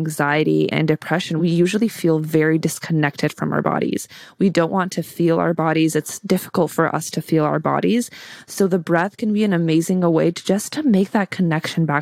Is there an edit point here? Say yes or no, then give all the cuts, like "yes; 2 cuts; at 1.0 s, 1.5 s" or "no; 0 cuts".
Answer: yes; 1 cut; at 1.2 s